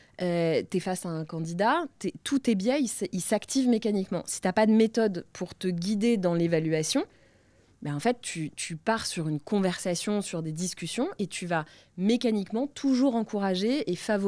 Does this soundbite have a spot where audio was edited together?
no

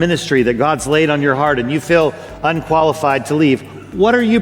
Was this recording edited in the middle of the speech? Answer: no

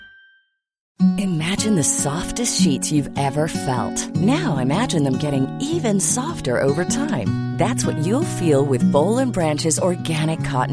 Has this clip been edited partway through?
yes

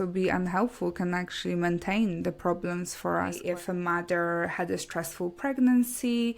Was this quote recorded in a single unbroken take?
no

